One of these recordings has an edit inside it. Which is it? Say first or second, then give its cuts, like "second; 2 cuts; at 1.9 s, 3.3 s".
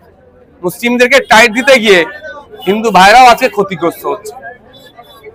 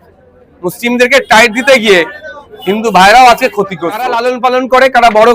second; 1 cut; at 4.1 s